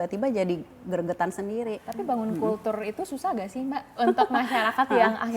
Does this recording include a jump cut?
yes; 2 cuts; at 1.8 s, 4.0 s

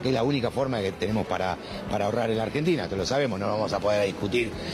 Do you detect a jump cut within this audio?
no; 0 cuts

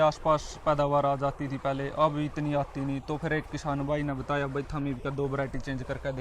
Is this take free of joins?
yes; 0 cuts

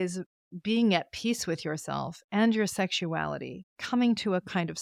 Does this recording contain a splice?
no; 0 cuts

